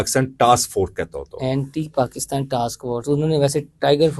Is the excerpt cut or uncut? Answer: uncut